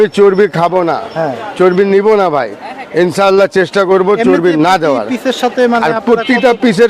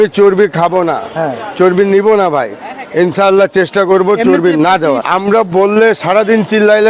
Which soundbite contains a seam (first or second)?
second